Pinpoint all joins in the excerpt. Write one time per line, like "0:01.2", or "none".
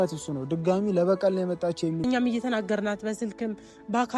0:02.0